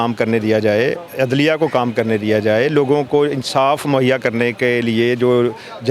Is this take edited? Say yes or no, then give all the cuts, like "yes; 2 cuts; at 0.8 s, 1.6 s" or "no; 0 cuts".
no; 0 cuts